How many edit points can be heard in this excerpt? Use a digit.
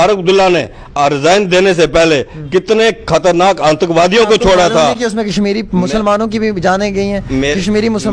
0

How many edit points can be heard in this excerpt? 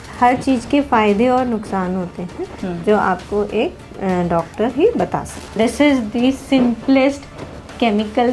1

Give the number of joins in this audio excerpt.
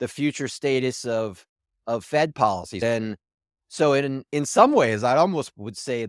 1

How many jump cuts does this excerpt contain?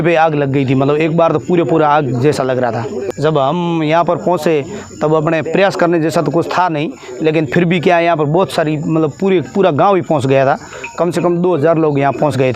1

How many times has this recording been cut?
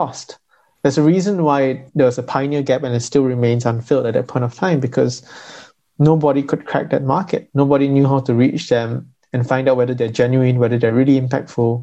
1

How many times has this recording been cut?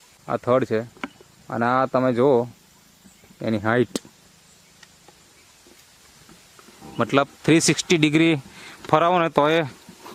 0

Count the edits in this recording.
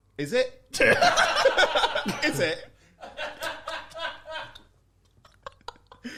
0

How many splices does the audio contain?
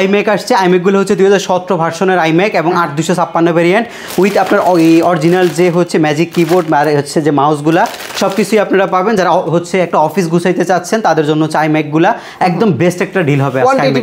0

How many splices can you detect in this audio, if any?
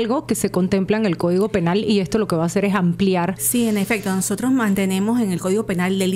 1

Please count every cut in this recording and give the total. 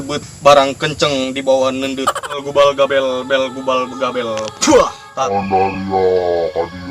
2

